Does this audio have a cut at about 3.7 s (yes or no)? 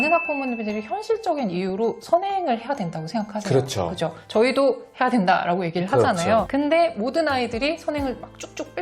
no